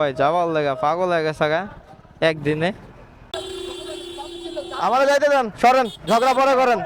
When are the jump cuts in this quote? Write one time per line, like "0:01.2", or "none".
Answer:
0:03.3